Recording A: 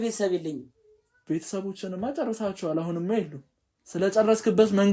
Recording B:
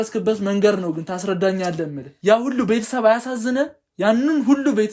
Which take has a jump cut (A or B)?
B